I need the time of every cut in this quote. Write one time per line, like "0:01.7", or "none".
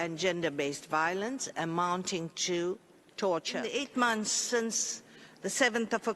0:03.7